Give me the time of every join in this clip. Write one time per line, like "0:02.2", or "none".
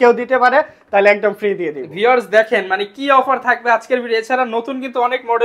none

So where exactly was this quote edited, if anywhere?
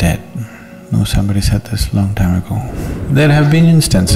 0:02.7

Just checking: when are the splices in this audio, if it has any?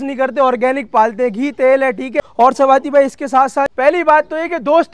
0:02.2
0:03.7

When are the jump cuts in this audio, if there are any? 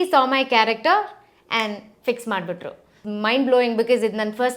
0:03.0

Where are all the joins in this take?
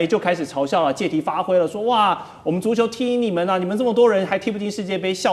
none

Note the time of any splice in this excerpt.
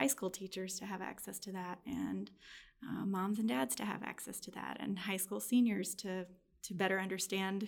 none

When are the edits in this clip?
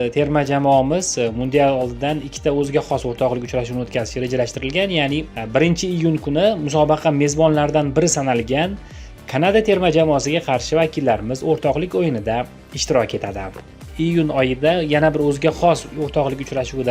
0:13.9

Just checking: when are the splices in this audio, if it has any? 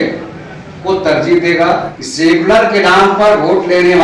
0:02.0

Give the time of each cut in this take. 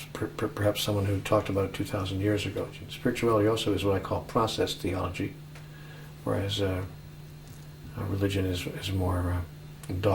0:02.9

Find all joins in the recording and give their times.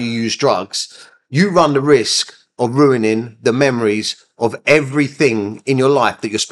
none

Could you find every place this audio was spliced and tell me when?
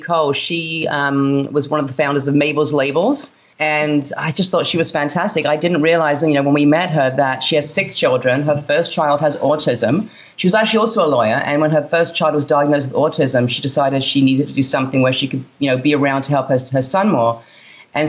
0:03.4

